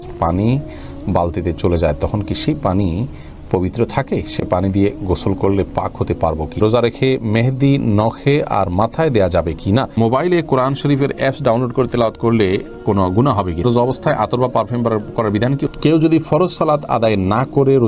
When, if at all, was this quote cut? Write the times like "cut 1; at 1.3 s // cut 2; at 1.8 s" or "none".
cut 1; at 6.6 s // cut 2; at 10.0 s // cut 3; at 13.6 s // cut 4; at 15.7 s